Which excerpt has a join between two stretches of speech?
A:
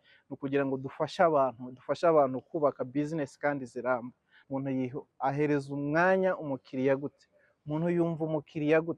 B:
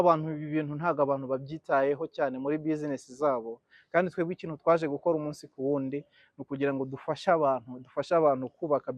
A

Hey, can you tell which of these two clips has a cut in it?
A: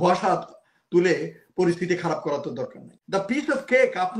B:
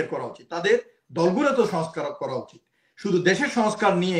A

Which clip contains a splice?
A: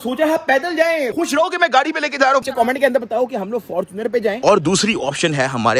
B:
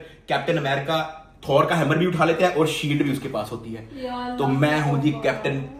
A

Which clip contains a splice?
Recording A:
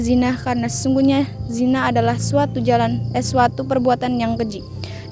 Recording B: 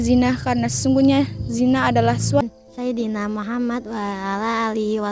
B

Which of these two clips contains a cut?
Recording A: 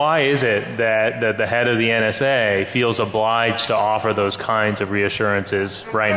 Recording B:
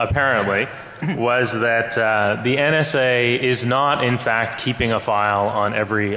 A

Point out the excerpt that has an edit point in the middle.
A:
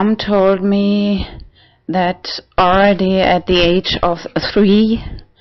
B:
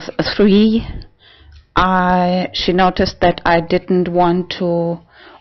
B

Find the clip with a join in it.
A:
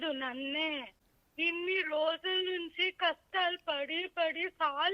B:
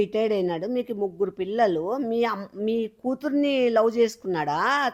A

